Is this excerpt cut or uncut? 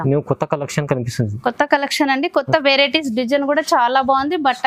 uncut